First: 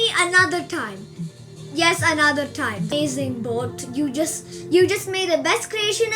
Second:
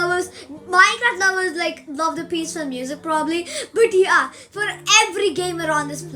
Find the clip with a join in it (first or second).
first